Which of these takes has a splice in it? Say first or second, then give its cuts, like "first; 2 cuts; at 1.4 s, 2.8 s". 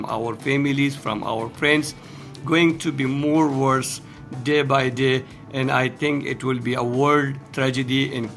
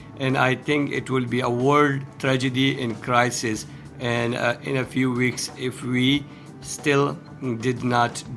first; 1 cut; at 2.3 s